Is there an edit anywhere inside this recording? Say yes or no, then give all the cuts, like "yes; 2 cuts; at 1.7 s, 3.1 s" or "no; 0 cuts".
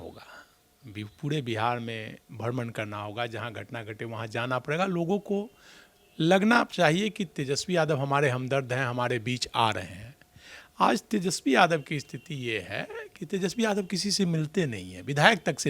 no; 0 cuts